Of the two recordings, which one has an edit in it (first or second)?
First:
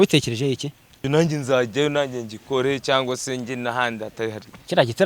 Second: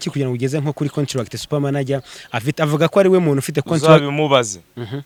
first